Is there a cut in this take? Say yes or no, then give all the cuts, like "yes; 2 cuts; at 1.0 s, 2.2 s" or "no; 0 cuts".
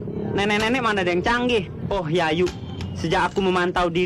yes; 1 cut; at 1.8 s